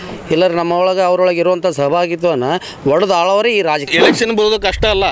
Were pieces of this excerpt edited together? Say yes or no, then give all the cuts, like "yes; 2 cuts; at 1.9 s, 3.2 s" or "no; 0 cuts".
yes; 1 cut; at 3.8 s